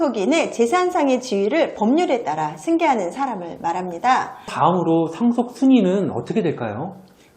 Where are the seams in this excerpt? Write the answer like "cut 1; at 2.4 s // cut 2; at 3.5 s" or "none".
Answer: cut 1; at 4.5 s